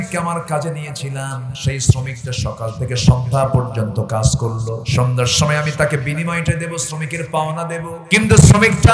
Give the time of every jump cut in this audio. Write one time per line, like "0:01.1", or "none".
0:01.5
0:04.8
0:08.0